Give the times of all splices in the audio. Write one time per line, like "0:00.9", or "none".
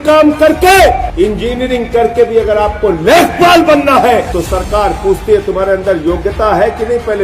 0:01.1
0:04.3